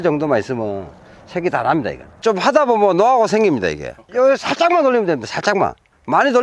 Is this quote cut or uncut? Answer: uncut